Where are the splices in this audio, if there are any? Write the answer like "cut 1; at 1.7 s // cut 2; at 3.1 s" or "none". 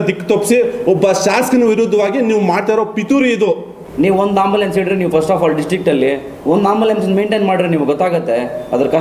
cut 1; at 3.8 s // cut 2; at 6.3 s